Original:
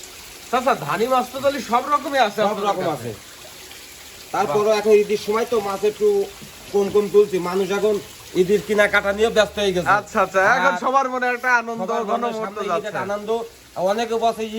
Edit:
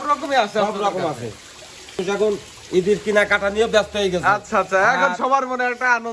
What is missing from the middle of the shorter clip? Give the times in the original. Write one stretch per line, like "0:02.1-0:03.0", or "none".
0:03.9-0:07.7